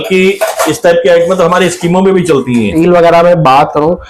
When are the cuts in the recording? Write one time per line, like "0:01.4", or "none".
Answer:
0:02.7